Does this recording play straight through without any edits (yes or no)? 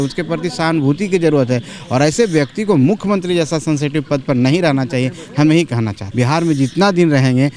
no